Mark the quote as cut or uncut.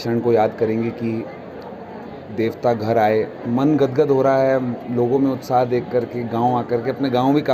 cut